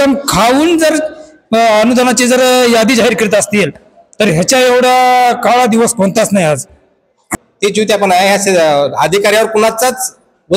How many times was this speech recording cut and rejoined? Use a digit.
1